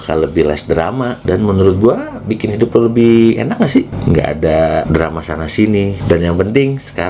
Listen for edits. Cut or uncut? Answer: cut